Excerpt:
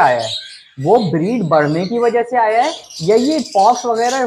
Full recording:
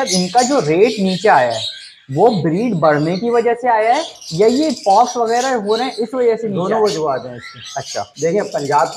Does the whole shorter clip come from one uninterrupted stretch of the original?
yes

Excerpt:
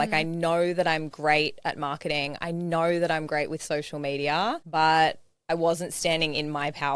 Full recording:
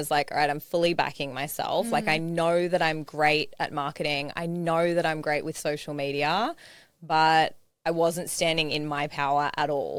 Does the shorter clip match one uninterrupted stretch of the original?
no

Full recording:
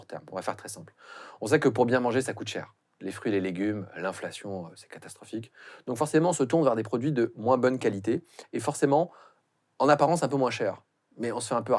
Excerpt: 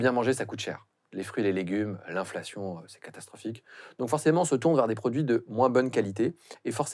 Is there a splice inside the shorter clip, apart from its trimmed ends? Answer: no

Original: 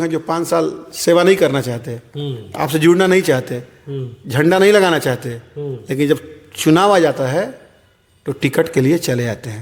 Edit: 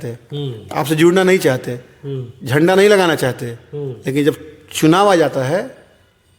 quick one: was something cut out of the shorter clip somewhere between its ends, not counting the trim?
no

